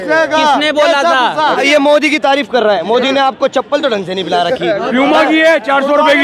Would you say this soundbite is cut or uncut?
cut